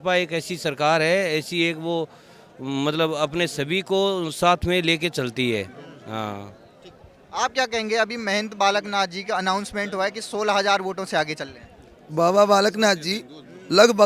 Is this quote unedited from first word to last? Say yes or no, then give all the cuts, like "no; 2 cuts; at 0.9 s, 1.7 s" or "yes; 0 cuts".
yes; 0 cuts